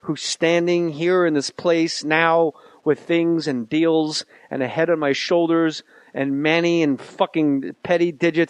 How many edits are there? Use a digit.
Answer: 1